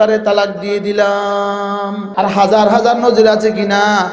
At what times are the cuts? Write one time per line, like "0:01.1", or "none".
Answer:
0:02.0

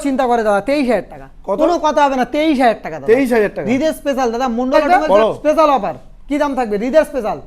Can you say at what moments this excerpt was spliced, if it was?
0:04.7

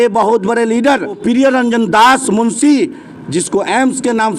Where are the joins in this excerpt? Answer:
0:01.2
0:03.1

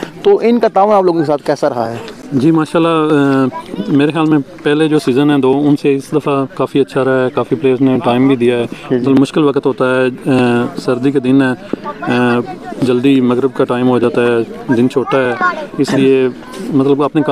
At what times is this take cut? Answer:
none

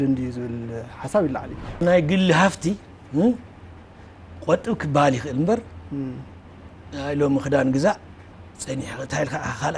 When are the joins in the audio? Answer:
0:01.8

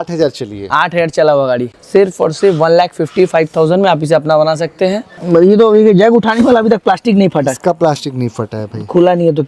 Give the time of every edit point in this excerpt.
0:01.7
0:05.1

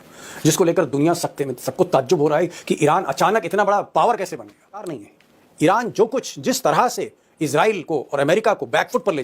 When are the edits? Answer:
0:05.0

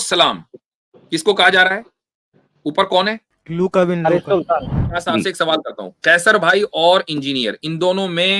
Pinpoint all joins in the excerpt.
0:03.3
0:04.9

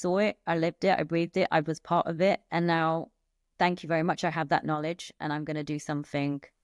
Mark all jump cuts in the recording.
none

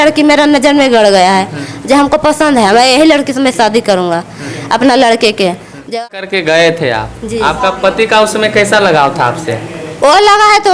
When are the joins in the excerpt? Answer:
0:05.9

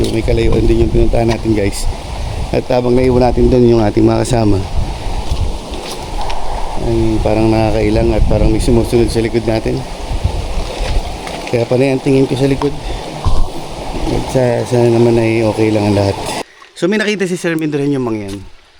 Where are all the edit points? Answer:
0:16.4

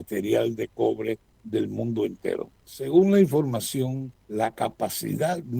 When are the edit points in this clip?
0:01.3
0:02.6
0:04.1

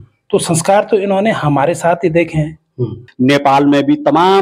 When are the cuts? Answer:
0:03.1

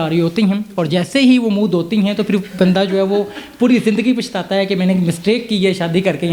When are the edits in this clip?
none

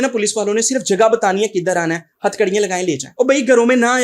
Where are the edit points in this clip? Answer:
0:03.1

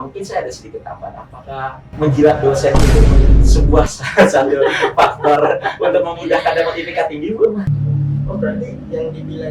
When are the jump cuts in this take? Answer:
0:07.7

